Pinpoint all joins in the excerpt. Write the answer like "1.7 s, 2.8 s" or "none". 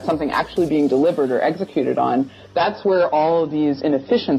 none